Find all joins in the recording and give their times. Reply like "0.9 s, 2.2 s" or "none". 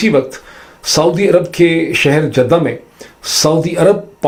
none